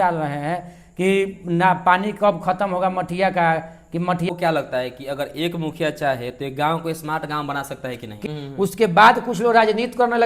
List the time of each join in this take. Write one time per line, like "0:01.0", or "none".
0:04.3
0:08.1